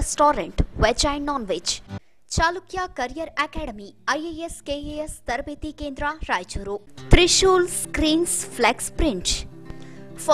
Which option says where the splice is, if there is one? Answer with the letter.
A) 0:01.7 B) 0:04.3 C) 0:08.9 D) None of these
A